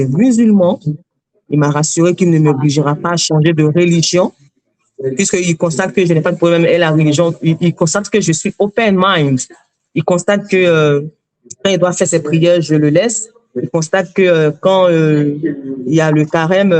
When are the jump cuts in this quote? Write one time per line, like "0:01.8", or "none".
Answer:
none